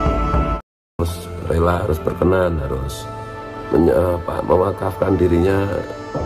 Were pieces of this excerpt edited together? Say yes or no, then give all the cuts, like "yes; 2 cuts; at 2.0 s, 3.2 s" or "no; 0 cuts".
yes; 1 cut; at 1.0 s